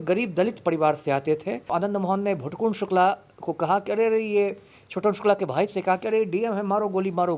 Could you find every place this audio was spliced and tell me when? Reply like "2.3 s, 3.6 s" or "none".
1.7 s